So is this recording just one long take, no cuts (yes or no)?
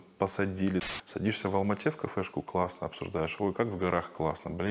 no